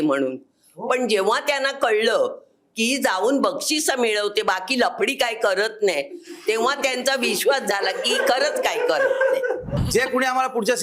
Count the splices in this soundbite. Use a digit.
1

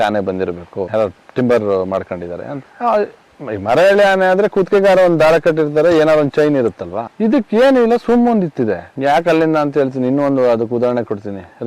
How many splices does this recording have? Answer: 1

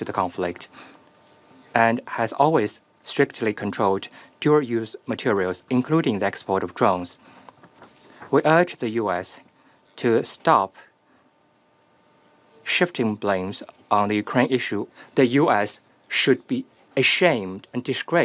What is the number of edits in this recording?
1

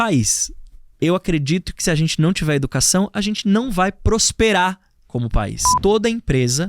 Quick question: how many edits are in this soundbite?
1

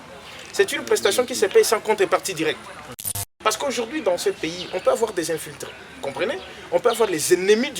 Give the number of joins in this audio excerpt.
1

